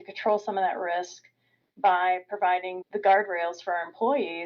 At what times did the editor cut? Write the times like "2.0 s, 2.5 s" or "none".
2.7 s